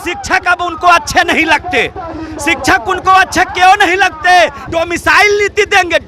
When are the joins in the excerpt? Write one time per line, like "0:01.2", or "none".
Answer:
0:04.6

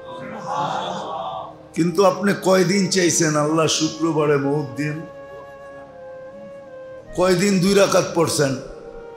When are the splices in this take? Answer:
0:05.0
0:07.1

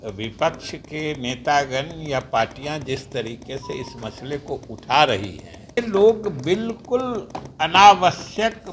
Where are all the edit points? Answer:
0:05.8

